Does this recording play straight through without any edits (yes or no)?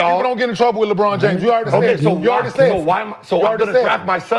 yes